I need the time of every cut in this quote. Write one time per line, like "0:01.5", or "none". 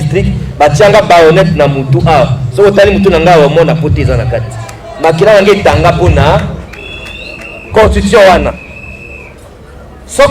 none